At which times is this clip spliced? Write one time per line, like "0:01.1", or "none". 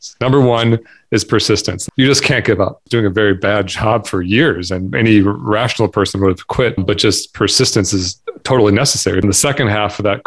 0:01.7
0:02.9
0:09.2